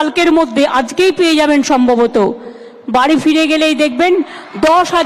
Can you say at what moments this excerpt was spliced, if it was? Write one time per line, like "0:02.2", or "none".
none